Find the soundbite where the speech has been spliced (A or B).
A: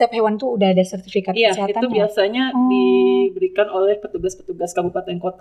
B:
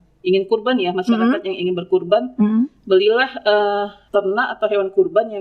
B